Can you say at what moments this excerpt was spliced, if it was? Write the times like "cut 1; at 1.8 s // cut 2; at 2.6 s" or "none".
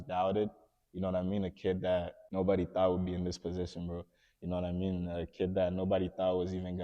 cut 1; at 2.2 s